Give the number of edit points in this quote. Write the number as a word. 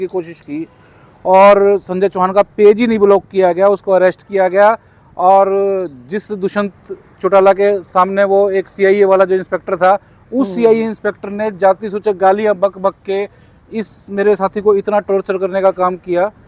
zero